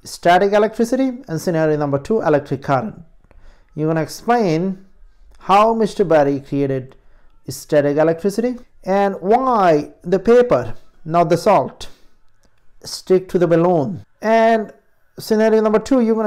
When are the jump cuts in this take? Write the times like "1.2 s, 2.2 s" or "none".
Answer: 8.7 s, 14.0 s